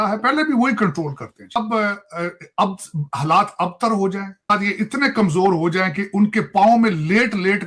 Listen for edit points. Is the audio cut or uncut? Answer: cut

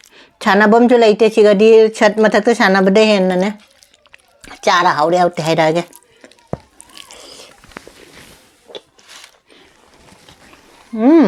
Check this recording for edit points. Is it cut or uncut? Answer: uncut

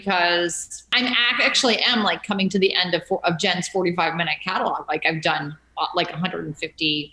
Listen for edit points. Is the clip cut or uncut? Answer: cut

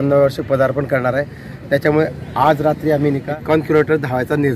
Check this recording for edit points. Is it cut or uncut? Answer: cut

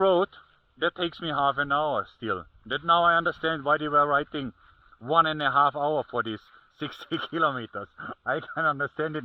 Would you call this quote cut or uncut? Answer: uncut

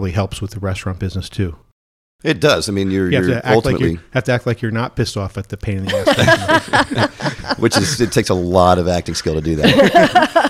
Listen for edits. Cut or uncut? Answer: uncut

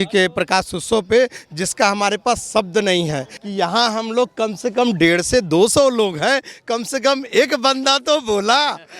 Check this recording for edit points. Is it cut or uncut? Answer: cut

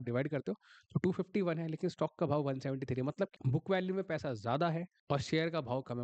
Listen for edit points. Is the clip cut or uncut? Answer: cut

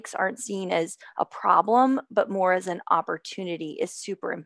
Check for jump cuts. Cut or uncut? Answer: uncut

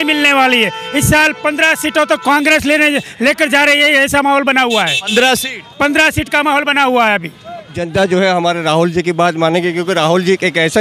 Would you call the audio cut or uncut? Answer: cut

